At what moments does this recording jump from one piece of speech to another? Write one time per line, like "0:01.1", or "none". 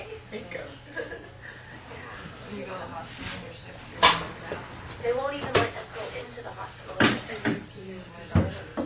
0:05.4